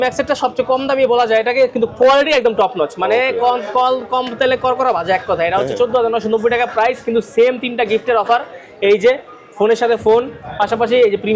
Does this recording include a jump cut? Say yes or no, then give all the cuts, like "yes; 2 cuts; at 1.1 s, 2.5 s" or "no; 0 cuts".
no; 0 cuts